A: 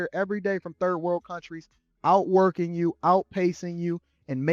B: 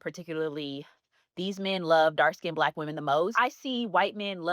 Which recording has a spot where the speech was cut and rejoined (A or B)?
B